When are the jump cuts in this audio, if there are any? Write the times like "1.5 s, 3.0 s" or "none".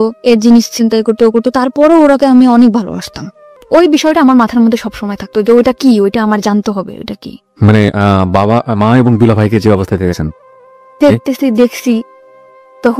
3.5 s